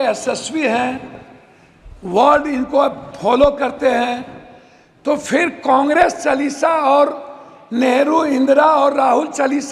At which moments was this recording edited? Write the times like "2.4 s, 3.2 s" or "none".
none